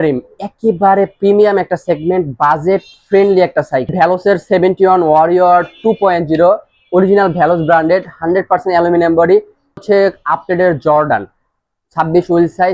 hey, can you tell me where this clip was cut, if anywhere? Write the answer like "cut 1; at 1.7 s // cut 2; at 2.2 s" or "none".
cut 1; at 3.9 s // cut 2; at 9.8 s